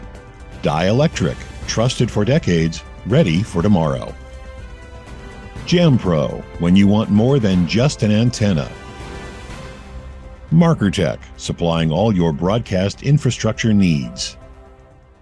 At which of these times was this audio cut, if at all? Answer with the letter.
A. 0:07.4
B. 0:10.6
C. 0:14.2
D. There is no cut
C